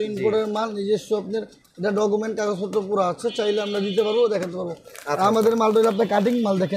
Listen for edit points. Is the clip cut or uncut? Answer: uncut